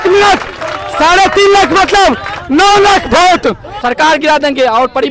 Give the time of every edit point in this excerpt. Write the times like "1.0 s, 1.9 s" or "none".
3.7 s